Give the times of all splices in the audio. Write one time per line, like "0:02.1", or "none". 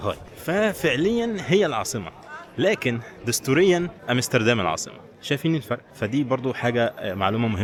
none